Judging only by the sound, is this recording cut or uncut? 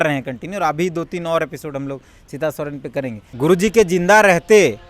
cut